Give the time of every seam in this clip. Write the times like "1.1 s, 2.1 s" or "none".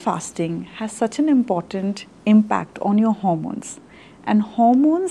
none